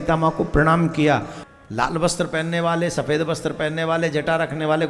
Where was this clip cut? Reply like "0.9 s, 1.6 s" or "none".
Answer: 1.4 s